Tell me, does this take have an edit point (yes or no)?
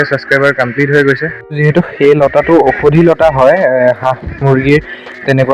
yes